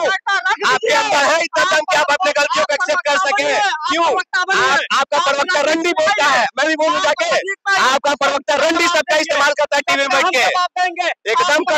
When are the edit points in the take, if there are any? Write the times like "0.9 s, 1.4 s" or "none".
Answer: none